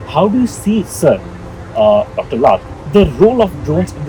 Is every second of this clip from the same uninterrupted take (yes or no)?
yes